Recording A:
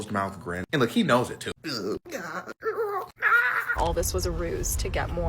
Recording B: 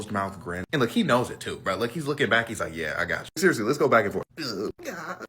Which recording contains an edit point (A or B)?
A